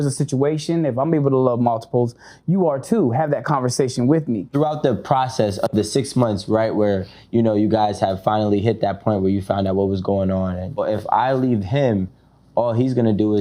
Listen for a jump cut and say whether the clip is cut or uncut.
cut